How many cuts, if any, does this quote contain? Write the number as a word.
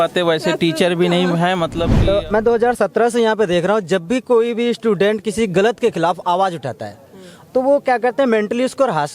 one